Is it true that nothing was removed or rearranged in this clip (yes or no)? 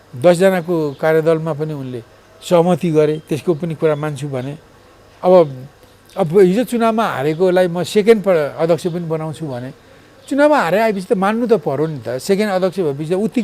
yes